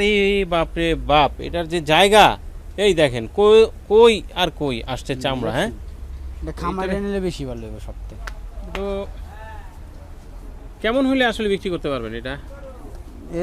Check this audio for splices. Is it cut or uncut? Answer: uncut